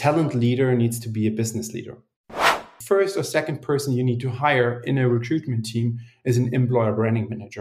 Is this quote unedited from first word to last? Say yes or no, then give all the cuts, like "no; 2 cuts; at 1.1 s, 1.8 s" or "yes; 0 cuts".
no; 1 cut; at 2.5 s